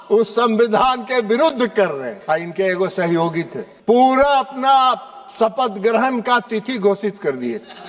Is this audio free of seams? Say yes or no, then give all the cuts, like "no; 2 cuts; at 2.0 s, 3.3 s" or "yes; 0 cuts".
no; 2 cuts; at 2.2 s, 3.6 s